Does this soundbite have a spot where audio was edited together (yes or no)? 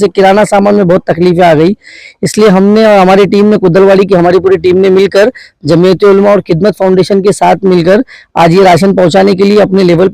no